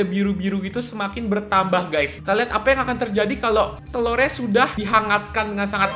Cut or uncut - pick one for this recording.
cut